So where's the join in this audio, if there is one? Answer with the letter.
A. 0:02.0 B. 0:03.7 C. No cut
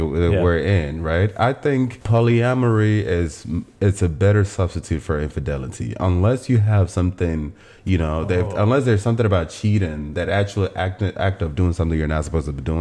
A